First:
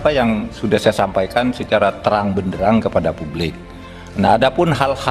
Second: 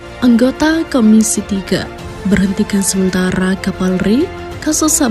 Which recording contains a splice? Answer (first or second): first